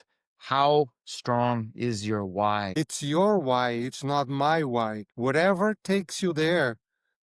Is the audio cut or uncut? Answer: cut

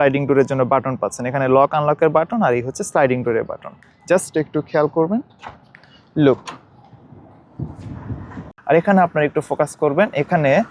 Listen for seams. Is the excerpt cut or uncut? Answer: cut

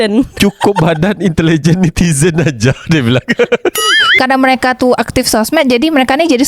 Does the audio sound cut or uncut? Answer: cut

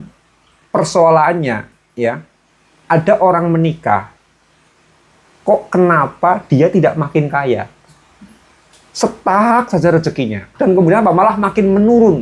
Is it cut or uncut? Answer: cut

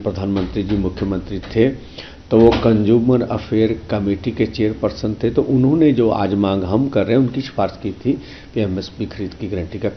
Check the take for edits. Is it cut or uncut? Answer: uncut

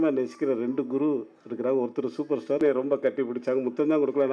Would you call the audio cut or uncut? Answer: cut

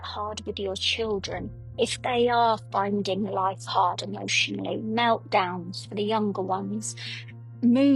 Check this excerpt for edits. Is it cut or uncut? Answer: uncut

